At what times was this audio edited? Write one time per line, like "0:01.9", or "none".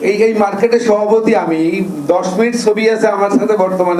none